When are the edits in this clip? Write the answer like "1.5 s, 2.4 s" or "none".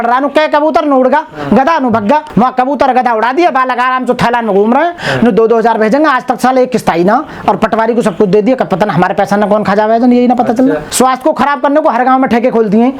2.3 s, 5.0 s, 10.9 s